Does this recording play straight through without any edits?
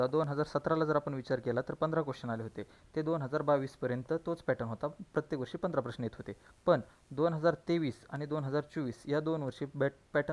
yes; 0 cuts

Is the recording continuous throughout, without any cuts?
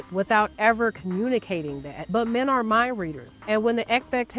yes; 0 cuts

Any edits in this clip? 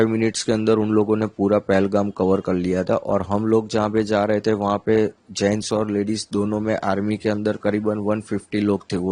no; 0 cuts

